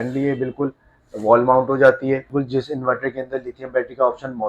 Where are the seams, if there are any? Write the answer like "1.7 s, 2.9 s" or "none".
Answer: 2.4 s